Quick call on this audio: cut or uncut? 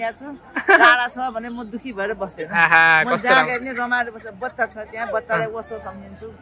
uncut